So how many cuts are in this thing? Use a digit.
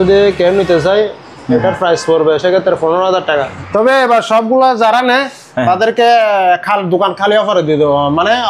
1